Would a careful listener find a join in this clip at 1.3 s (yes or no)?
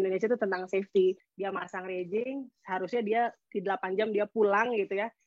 yes